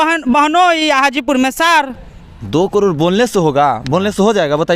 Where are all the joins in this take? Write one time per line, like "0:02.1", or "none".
0:02.2